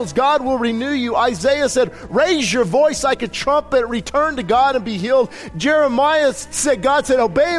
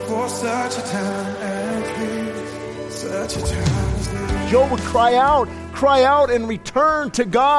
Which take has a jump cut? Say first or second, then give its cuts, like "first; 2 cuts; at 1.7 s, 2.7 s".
second; 1 cut; at 4.4 s